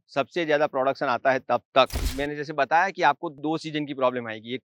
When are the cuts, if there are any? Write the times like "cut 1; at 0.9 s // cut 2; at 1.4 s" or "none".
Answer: cut 1; at 2.0 s // cut 2; at 3.3 s